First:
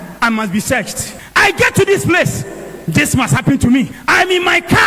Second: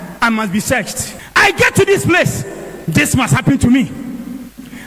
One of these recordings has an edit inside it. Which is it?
first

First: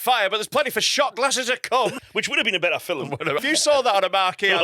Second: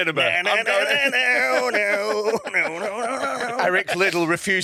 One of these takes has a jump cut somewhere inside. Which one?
first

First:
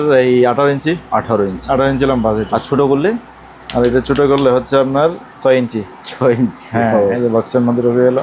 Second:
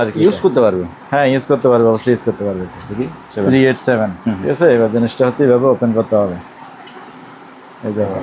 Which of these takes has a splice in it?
second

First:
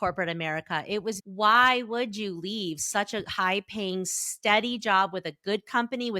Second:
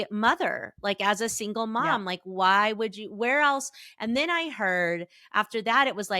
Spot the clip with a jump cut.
first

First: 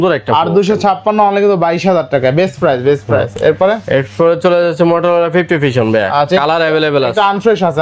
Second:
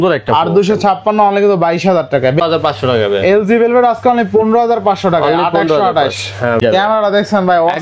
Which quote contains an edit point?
second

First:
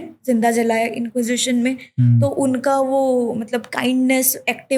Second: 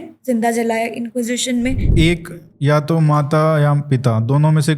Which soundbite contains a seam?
second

